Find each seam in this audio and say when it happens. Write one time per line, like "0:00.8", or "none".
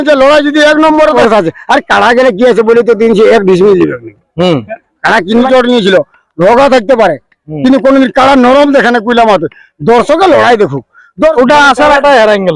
0:01.2
0:05.5
0:11.3